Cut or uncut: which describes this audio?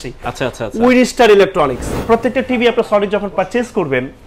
cut